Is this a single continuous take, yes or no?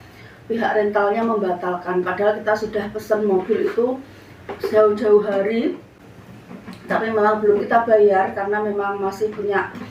yes